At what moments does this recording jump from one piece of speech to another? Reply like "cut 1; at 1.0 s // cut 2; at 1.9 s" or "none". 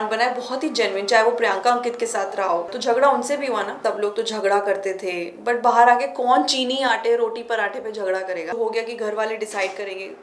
cut 1; at 2.7 s // cut 2; at 3.8 s // cut 3; at 8.5 s